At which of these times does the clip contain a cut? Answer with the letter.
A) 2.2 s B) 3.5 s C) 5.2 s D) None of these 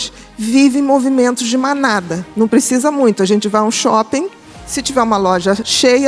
A